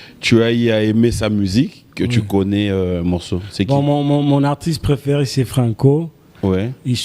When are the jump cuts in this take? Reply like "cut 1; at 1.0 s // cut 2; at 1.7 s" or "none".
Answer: none